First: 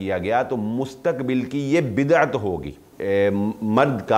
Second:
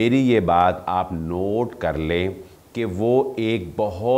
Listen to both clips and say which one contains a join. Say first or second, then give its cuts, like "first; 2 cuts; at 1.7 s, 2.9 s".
first; 1 cut; at 2.9 s